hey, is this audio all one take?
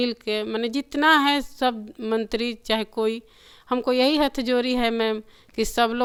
yes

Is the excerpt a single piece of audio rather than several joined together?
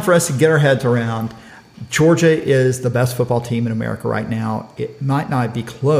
yes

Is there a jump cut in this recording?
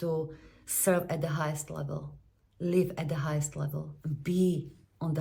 no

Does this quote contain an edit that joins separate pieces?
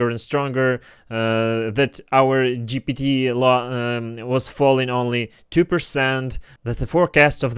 no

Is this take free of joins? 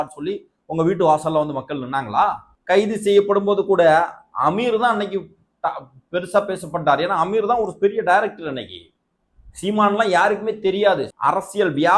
no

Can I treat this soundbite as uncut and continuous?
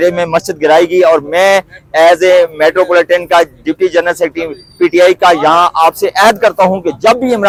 yes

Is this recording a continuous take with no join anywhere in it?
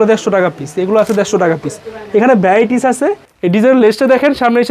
no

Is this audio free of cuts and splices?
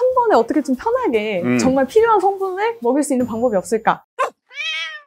no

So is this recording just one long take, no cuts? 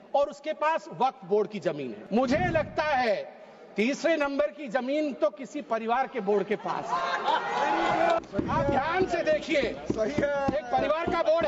no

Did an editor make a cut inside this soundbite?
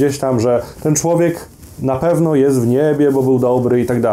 no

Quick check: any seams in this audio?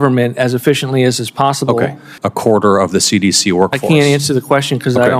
yes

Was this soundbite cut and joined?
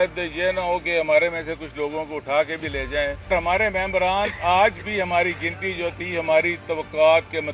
yes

